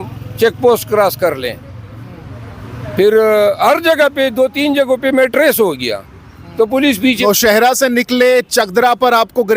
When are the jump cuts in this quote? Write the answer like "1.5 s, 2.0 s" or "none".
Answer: 7.2 s